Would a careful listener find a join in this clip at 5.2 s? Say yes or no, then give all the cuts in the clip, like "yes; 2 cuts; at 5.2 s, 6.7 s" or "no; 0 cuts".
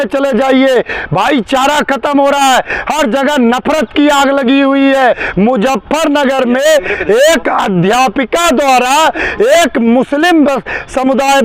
yes; 1 cut; at 5.2 s